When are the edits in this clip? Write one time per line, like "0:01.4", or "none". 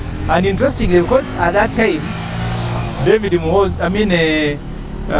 none